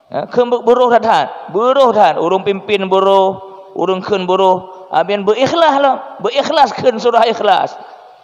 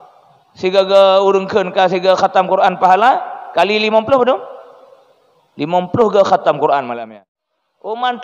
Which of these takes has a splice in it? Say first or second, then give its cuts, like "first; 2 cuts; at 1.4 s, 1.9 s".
second; 1 cut; at 7.0 s